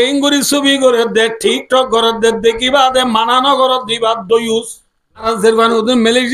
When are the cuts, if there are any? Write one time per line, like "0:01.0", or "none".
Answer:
0:05.2